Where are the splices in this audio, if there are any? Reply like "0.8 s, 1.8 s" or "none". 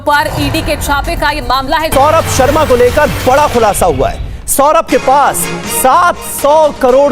1.8 s